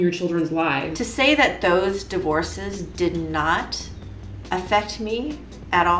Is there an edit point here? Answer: yes; 1 cut; at 0.9 s

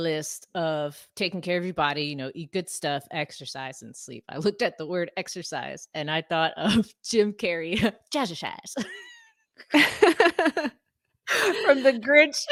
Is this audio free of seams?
yes; 0 cuts

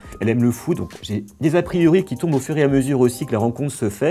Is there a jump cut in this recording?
no; 0 cuts

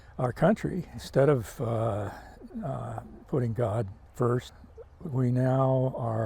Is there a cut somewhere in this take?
yes; 3 cuts; at 1.0 s, 4.0 s, 4.6 s

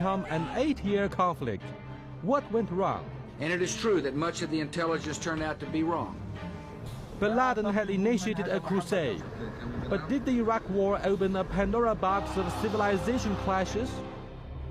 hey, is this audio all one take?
no; 1 cut; at 6.9 s

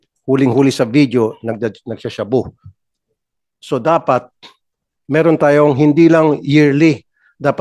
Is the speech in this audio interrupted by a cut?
no; 0 cuts

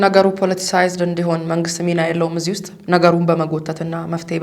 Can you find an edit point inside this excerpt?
no; 0 cuts

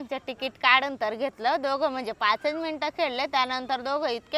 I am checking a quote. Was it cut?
no; 0 cuts

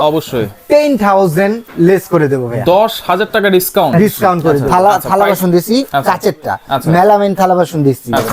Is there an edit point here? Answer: yes; 1 cut; at 4.7 s

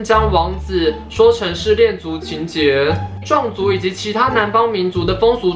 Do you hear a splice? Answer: yes; 1 cut; at 3.2 s

